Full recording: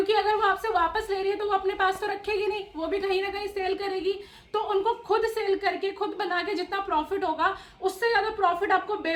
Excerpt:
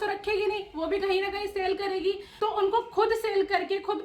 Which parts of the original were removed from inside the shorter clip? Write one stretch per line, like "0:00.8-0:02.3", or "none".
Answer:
0:04.3-0:04.4